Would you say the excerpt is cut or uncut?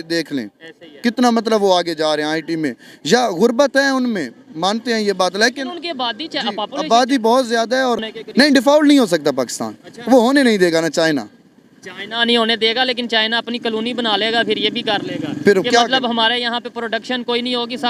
cut